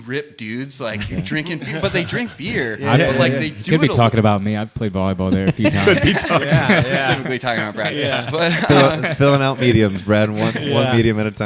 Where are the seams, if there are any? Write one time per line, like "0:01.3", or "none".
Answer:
none